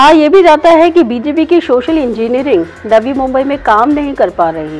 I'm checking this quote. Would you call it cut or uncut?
uncut